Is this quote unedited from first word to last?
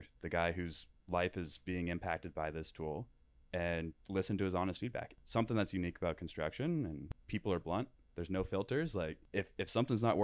no; 3 cuts; at 5.1 s, 7.1 s, 9.2 s

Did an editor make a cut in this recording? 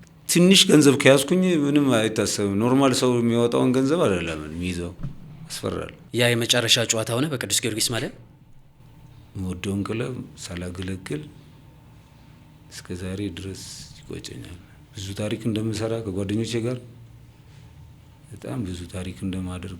yes; 1 cut; at 6.0 s

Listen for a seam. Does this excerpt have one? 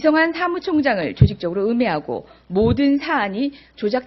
yes; 1 cut; at 2.4 s

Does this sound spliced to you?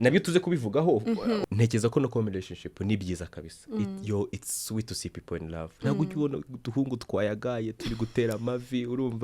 yes; 1 cut; at 1.5 s

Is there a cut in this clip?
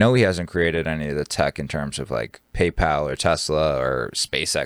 no; 0 cuts

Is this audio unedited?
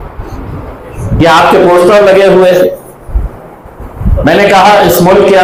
yes; 0 cuts

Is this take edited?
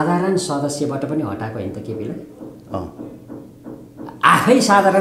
no; 0 cuts

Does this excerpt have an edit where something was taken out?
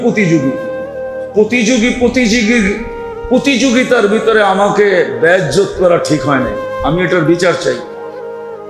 yes; 1 cut; at 7.8 s

